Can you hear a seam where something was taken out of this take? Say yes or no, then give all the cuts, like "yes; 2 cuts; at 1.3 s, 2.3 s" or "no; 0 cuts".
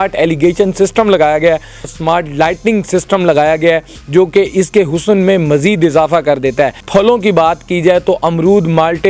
yes; 2 cuts; at 1.9 s, 6.8 s